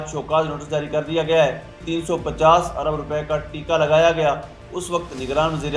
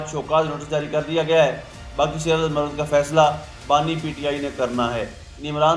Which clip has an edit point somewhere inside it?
first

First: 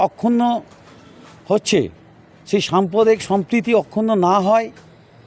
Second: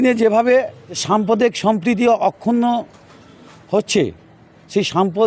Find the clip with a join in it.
second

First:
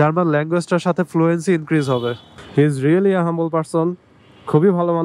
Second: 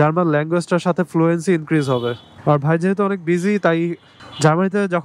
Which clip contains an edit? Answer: first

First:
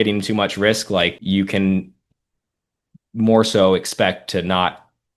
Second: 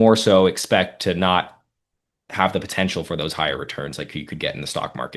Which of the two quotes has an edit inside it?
first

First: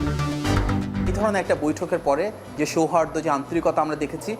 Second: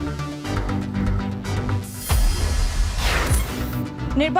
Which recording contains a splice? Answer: first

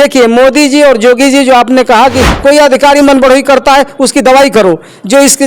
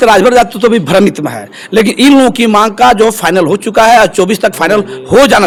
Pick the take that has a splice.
first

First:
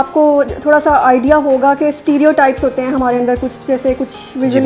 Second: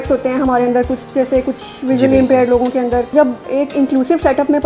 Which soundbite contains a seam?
second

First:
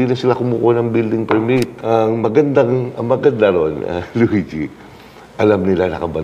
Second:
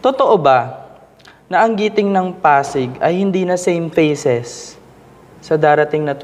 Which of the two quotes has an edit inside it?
first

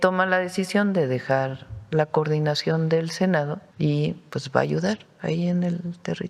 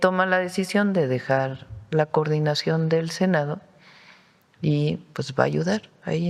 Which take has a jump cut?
first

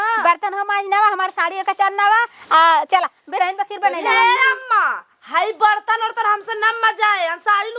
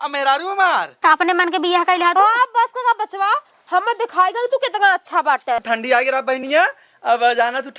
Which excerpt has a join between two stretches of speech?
second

